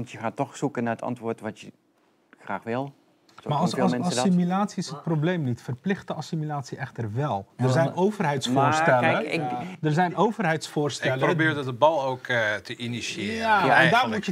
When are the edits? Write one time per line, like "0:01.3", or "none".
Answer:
none

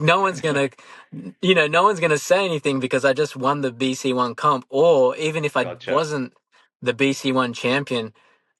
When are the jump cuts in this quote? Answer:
none

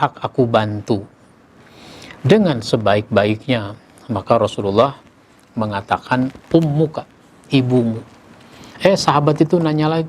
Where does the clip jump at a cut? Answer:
none

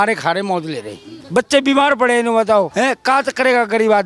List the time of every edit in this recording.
0:01.1
0:02.7

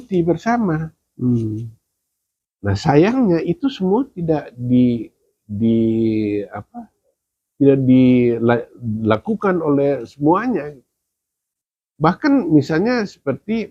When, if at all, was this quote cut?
none

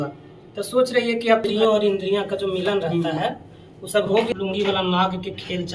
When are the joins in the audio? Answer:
0:01.5
0:04.3

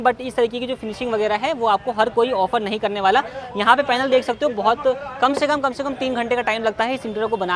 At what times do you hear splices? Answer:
none

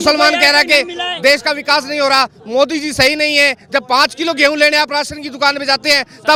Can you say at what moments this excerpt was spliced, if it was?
none

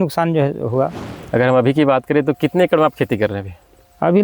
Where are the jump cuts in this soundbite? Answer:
0:01.1

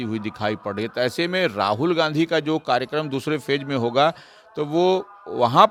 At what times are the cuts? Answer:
none

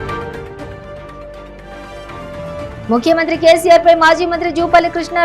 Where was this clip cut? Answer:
0:02.8

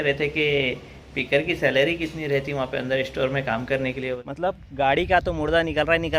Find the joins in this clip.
0:04.2

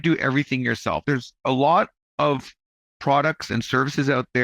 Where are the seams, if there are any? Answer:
0:01.0

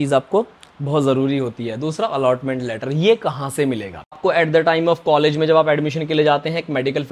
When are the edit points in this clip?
0:04.2

